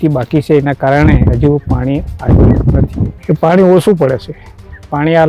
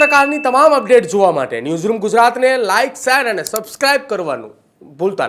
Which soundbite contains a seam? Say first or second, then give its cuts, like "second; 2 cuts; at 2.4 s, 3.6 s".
first; 1 cut; at 3.1 s